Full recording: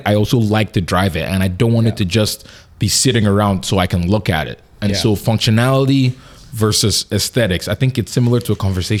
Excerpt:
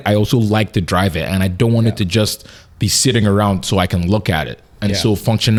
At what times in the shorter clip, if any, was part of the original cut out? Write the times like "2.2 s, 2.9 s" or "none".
none